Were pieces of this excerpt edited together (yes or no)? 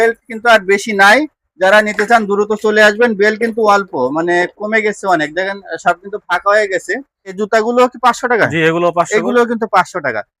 yes